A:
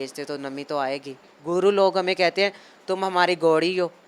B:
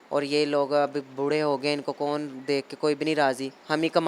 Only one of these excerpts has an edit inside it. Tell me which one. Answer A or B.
A